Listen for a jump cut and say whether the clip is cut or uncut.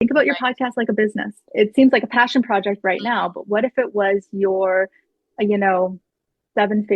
cut